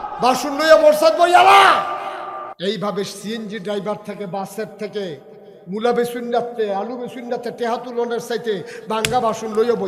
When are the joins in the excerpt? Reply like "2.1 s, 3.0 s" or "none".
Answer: 2.5 s